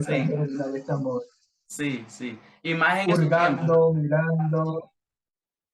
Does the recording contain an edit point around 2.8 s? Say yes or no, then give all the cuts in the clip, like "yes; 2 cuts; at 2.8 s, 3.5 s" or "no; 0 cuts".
no; 0 cuts